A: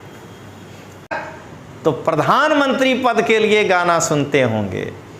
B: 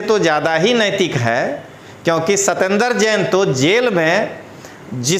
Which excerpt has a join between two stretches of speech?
A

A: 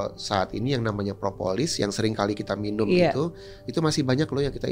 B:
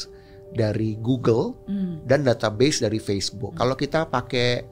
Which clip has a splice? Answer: B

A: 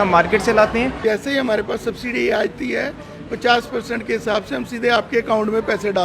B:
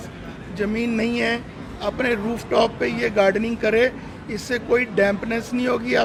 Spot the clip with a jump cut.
A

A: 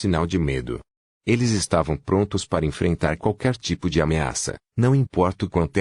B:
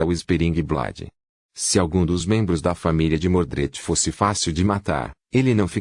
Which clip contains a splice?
A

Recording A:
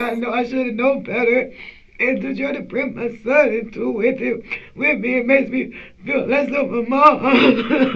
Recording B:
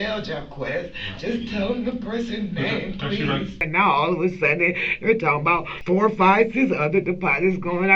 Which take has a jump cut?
B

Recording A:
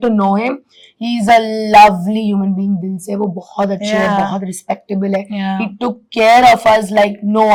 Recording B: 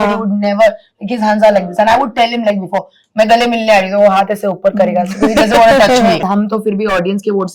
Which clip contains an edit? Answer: B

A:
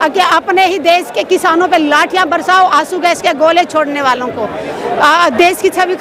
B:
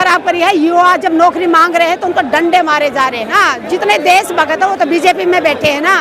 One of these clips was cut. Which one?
B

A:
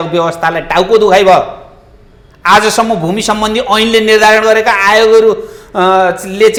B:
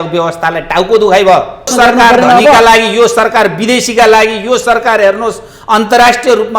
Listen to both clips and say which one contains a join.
B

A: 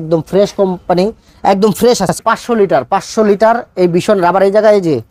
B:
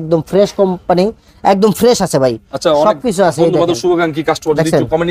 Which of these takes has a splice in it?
A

